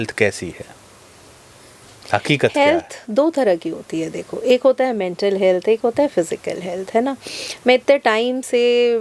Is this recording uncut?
yes; 0 cuts

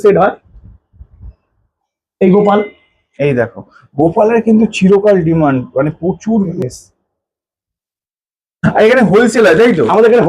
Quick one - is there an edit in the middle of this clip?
yes; 1 cut; at 6.5 s

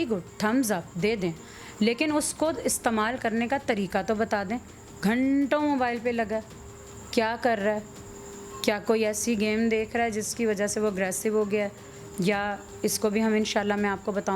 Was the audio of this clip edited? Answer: no; 0 cuts

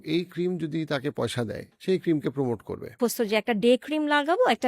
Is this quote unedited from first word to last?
no; 2 cuts; at 1.7 s, 2.9 s

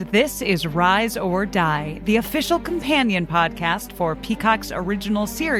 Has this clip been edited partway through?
no; 0 cuts

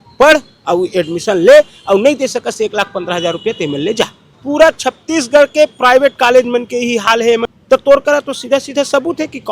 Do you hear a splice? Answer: yes; 2 cuts; at 4.3 s, 7.5 s

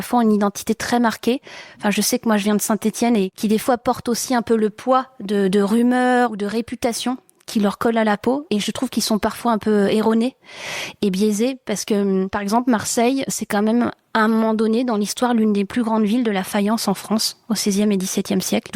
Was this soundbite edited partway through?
yes; 2 cuts; at 3.3 s, 8.4 s

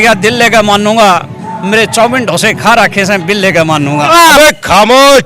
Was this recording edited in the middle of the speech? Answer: yes; 1 cut; at 4.4 s

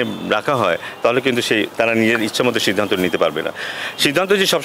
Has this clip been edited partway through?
no; 0 cuts

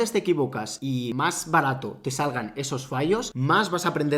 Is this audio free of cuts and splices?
no; 2 cuts; at 1.0 s, 3.3 s

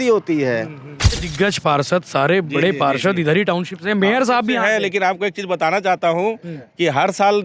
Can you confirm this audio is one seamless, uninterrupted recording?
no; 1 cut; at 1.1 s

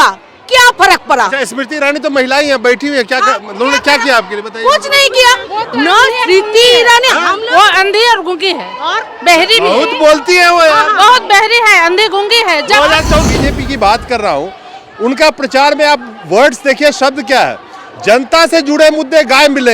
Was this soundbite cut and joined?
yes; 1 cut; at 13.2 s

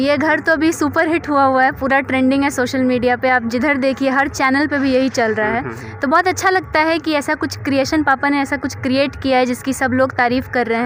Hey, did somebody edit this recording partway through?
no; 0 cuts

